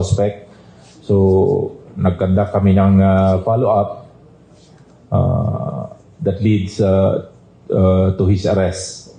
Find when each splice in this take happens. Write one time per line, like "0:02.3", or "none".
none